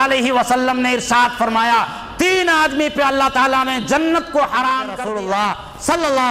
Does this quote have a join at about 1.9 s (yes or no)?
no